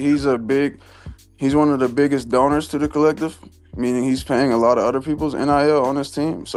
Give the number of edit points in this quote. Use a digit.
0